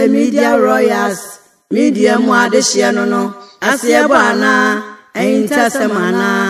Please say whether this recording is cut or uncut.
uncut